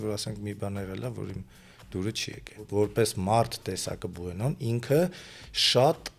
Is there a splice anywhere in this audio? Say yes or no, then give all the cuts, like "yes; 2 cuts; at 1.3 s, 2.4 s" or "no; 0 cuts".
yes; 1 cut; at 2.7 s